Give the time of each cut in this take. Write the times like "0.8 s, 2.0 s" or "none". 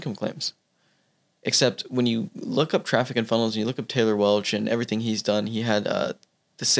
none